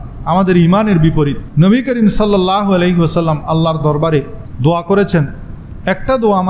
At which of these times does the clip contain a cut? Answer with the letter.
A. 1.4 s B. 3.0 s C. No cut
A